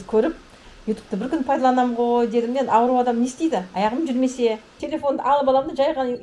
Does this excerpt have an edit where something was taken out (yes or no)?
yes